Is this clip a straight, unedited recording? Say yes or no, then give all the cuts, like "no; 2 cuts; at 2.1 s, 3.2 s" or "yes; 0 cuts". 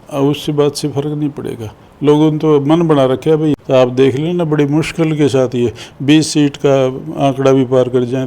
no; 1 cut; at 3.6 s